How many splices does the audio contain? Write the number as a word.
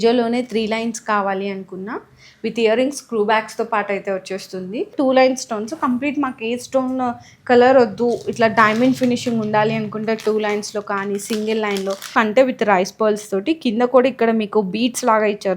two